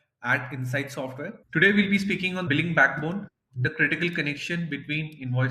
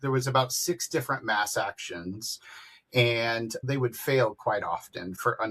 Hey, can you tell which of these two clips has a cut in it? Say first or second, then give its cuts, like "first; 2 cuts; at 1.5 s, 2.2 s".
first; 2 cuts; at 1.4 s, 2.4 s